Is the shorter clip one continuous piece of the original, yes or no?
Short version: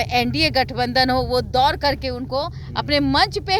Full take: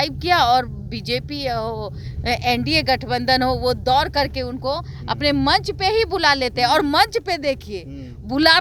yes